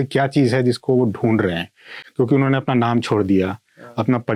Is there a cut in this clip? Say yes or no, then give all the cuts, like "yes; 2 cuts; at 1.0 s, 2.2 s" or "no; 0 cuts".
no; 0 cuts